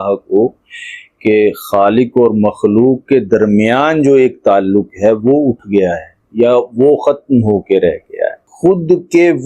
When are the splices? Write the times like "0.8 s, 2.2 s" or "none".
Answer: 8.5 s

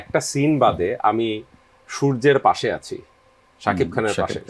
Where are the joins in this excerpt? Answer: none

